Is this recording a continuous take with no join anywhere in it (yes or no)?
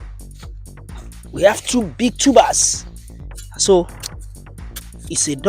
no